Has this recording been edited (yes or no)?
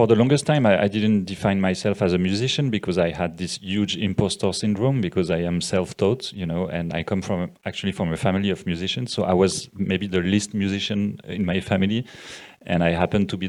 no